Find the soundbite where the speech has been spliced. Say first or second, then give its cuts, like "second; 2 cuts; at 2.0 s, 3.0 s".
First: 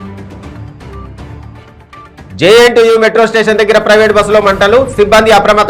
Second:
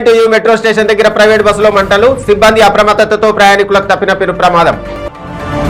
first; 1 cut; at 1.0 s